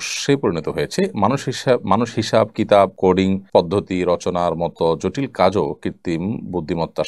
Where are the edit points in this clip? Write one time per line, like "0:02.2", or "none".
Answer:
0:03.1